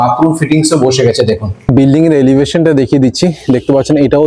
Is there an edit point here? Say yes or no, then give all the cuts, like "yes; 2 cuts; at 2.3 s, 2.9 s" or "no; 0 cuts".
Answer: yes; 1 cut; at 1.7 s